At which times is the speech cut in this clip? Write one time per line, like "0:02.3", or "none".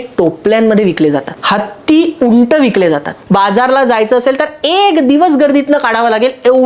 0:01.3
0:03.1